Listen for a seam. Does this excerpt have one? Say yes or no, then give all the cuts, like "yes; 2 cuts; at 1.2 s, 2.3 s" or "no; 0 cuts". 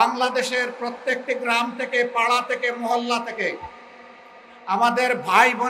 no; 0 cuts